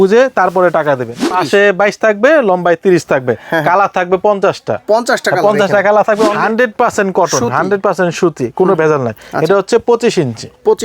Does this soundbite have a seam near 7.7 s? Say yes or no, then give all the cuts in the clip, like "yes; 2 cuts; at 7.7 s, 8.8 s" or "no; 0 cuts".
no; 2 cuts; at 1.3 s, 6.3 s